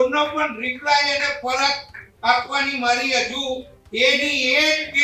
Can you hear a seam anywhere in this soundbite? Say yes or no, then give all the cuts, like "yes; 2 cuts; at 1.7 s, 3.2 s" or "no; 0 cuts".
no; 0 cuts